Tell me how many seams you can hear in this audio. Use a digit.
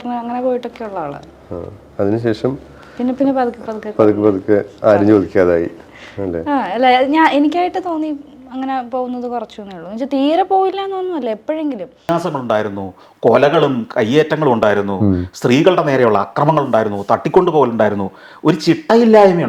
1